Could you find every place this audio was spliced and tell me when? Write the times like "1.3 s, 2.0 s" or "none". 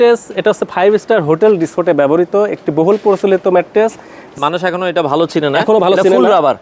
4.2 s

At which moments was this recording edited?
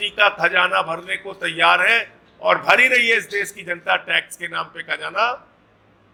none

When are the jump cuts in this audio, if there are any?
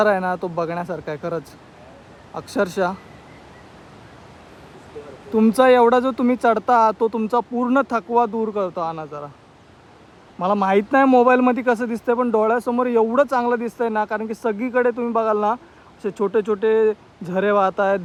none

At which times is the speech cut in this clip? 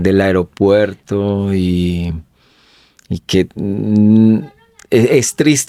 none

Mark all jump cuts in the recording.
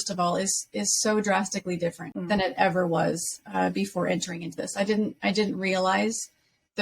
2.1 s

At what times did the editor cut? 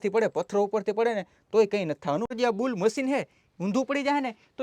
2.3 s

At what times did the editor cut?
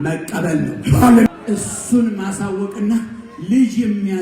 1.3 s

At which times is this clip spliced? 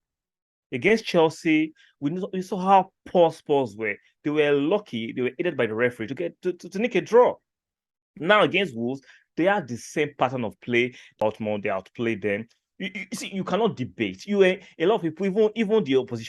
11.1 s

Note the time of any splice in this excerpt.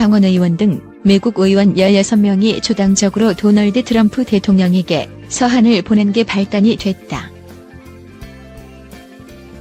none

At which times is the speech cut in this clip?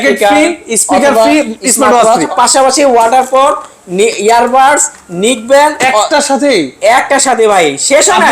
2.3 s

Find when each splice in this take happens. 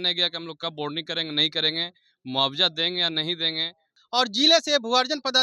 3.9 s

